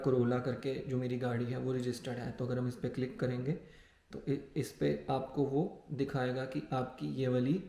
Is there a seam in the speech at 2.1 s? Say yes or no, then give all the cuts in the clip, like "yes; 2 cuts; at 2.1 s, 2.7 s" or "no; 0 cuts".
no; 0 cuts